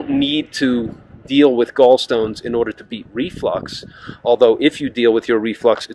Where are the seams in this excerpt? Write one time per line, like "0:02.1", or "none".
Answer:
none